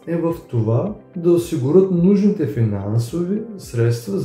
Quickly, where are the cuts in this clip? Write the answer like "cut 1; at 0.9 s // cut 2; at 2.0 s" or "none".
none